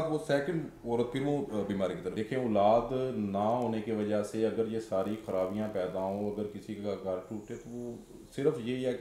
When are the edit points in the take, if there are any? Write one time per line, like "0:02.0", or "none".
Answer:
0:02.1